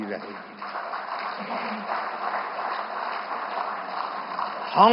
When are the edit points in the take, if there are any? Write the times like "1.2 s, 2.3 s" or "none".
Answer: none